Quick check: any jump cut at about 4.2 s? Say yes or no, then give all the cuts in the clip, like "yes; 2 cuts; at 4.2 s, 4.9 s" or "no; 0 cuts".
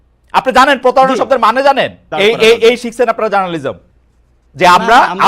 no; 1 cut; at 2.1 s